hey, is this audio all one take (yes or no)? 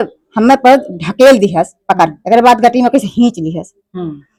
yes